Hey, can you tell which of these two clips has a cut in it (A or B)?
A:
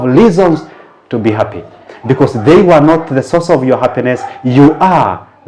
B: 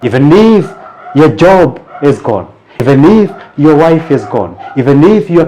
B